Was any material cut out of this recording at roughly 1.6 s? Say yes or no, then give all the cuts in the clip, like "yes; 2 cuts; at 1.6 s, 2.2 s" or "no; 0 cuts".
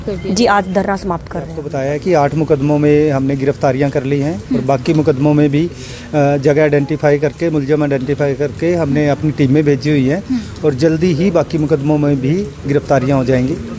yes; 1 cut; at 1.6 s